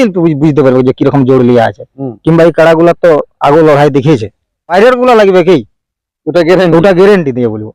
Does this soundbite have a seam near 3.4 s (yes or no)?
no